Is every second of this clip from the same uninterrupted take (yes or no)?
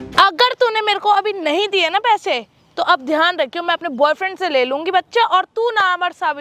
yes